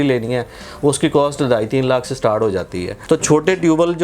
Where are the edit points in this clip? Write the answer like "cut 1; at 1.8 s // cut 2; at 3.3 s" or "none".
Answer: cut 1; at 2.9 s